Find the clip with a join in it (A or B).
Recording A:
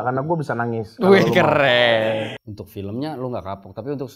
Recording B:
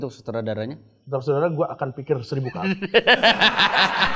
A